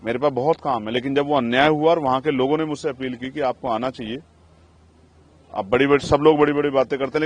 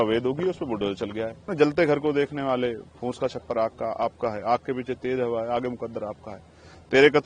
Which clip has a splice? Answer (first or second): second